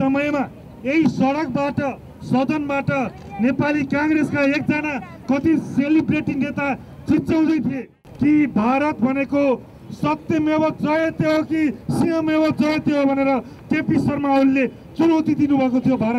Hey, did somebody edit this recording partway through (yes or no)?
yes